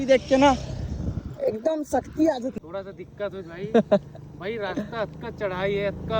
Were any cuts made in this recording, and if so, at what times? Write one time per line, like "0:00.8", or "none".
0:02.5